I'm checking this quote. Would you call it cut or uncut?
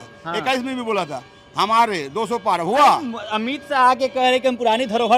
uncut